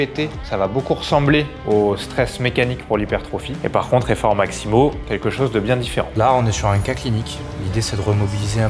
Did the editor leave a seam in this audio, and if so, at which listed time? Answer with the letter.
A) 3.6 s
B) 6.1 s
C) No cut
B